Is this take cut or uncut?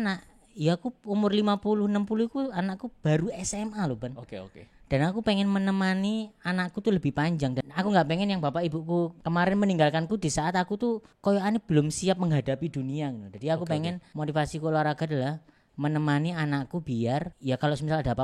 uncut